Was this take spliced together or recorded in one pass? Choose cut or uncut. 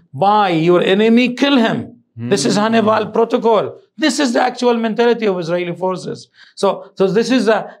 uncut